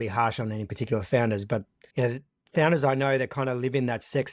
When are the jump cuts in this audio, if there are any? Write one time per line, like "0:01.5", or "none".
0:01.8